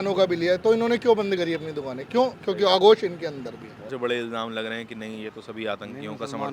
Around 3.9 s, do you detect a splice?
yes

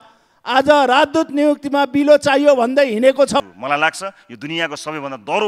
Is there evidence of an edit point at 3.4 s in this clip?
yes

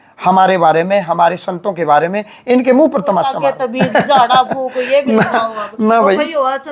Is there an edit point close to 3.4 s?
yes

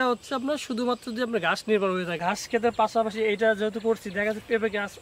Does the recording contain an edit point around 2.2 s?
yes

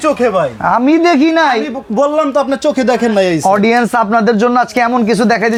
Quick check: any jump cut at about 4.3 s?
no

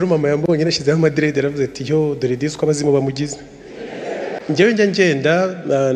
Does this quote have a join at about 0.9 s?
no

